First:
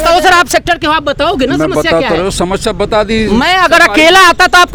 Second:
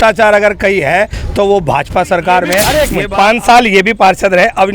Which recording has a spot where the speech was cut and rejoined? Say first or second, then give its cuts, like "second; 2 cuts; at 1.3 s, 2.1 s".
second; 1 cut; at 2.8 s